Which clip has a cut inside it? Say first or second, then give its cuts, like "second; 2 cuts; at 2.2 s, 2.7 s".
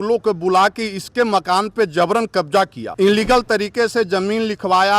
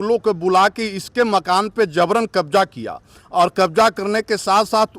first; 1 cut; at 2.8 s